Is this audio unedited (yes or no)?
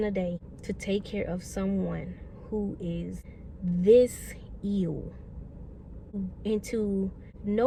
yes